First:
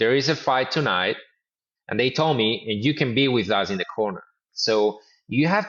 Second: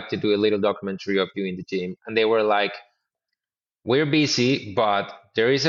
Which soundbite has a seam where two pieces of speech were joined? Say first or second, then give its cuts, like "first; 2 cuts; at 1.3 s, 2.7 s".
first; 1 cut; at 4.5 s